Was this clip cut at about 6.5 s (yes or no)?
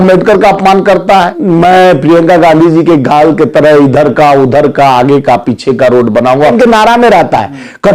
yes